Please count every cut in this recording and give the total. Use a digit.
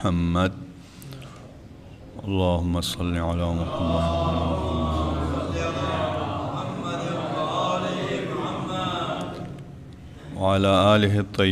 1